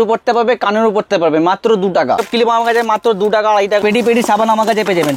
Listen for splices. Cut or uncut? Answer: cut